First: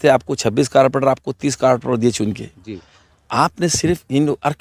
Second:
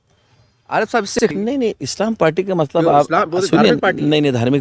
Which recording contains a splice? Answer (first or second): second